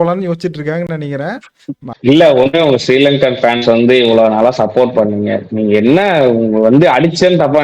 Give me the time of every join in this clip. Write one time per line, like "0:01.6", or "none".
0:01.9